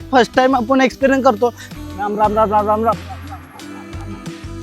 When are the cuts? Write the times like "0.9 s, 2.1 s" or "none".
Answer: 1.6 s

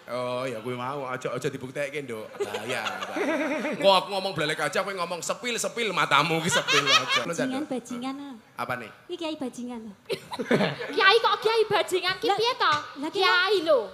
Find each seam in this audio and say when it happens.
7.3 s

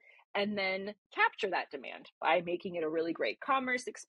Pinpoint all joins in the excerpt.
1.1 s

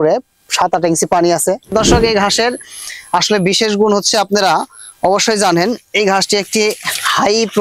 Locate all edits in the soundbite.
1.7 s

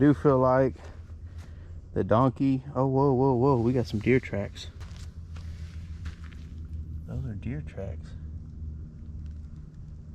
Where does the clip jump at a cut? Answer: 4.8 s

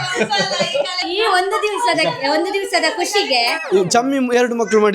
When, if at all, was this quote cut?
1.1 s, 3.6 s

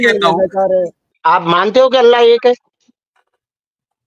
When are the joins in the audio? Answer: 1.0 s

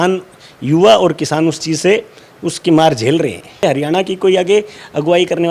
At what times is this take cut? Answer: 3.6 s

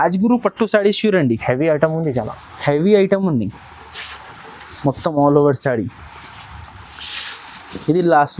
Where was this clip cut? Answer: none

